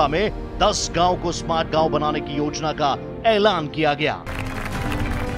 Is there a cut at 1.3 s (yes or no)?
no